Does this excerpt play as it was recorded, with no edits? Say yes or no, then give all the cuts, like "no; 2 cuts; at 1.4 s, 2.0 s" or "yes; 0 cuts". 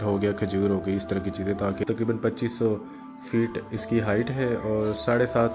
no; 1 cut; at 1.8 s